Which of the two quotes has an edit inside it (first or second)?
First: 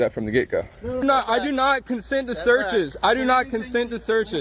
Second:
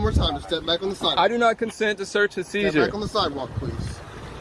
first